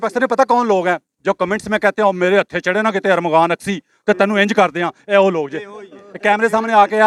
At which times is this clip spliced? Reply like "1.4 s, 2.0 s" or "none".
none